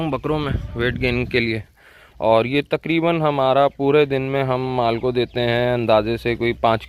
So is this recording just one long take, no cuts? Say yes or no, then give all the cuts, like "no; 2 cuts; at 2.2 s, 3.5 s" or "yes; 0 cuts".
yes; 0 cuts